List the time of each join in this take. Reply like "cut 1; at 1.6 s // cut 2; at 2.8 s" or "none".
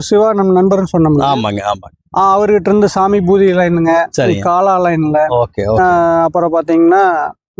none